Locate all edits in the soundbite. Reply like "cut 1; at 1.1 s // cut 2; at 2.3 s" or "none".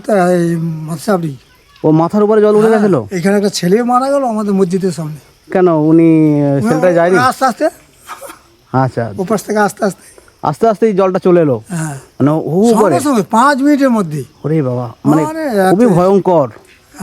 none